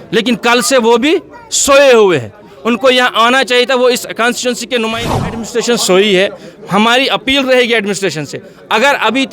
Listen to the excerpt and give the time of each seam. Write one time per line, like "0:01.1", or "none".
0:04.9